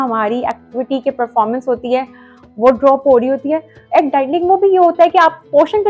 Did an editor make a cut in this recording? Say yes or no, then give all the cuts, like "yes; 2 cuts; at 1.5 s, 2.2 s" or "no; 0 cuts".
yes; 1 cut; at 3.7 s